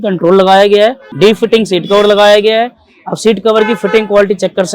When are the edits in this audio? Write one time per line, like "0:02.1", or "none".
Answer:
0:01.0